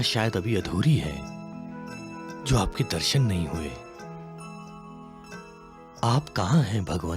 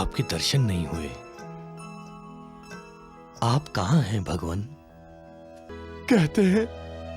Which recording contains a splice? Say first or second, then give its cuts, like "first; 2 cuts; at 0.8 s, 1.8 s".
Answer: second; 1 cut; at 5.7 s